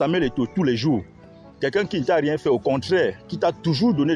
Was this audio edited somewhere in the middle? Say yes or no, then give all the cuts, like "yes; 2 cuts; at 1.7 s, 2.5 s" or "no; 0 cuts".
no; 0 cuts